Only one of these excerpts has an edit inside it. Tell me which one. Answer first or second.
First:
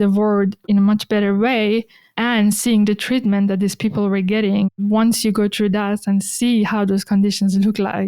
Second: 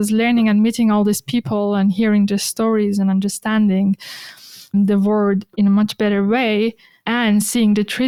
first